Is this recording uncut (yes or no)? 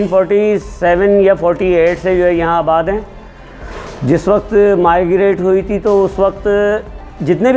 yes